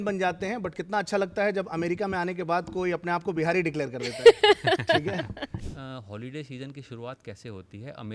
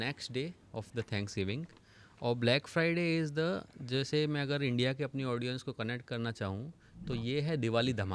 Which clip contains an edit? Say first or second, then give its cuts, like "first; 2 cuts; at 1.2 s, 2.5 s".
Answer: first; 1 cut; at 5.4 s